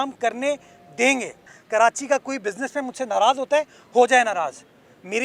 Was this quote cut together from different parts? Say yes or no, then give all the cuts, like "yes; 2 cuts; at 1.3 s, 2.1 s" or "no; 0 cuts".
yes; 1 cut; at 1.6 s